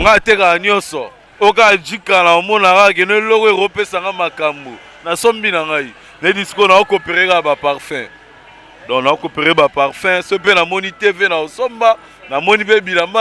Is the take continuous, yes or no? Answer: yes